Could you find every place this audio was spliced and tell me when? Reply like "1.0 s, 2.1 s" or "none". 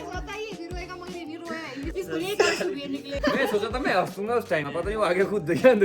1.9 s, 3.1 s, 4.7 s